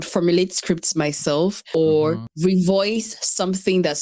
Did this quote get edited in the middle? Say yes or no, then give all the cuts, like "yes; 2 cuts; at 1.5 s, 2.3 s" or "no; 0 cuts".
yes; 2 cuts; at 1.6 s, 2.3 s